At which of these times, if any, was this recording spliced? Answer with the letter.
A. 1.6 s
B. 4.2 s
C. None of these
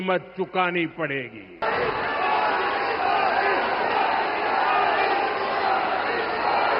A